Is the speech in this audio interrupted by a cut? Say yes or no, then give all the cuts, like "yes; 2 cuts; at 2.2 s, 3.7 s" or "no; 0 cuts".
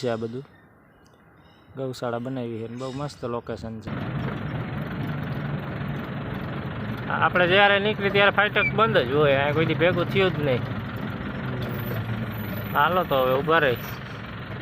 yes; 1 cut; at 3.9 s